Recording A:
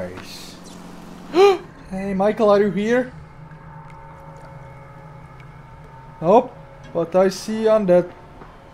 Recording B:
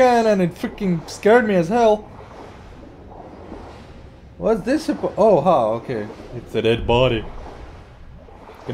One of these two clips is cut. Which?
A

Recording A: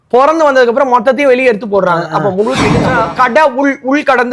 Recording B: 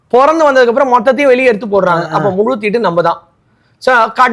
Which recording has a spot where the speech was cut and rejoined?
A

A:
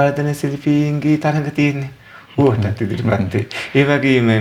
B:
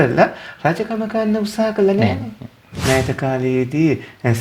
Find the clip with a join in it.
B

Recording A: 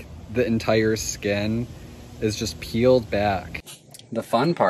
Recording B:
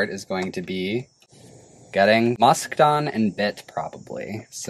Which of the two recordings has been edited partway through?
A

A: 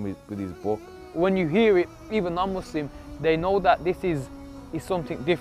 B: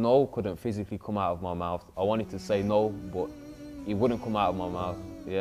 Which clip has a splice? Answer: A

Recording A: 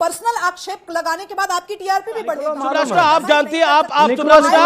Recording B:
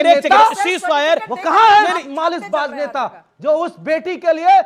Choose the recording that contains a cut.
A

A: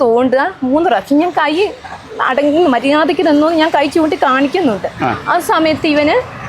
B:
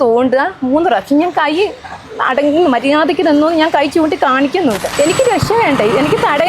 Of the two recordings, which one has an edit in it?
B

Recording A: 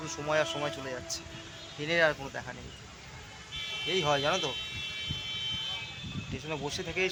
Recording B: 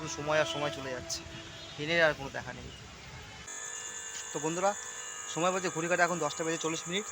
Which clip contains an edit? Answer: B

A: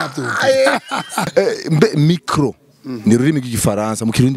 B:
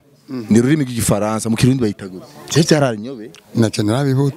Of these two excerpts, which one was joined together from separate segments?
A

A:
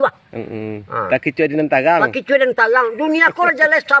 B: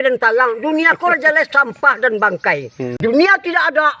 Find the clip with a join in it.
B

